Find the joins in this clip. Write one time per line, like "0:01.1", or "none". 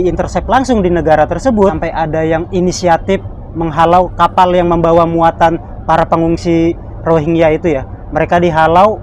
0:01.8